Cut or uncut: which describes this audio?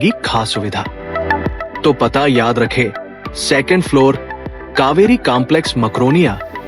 cut